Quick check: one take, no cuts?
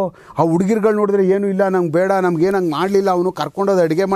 yes; 0 cuts

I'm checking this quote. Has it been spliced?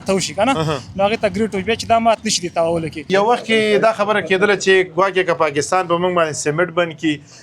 yes; 1 cut; at 2.9 s

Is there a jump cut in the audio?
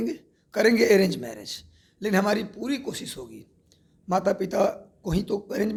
no; 0 cuts

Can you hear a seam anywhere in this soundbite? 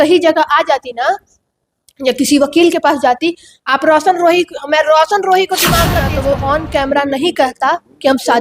yes; 1 cut; at 6.1 s

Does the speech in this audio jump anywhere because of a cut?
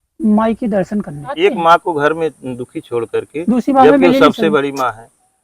yes; 1 cut; at 1.4 s

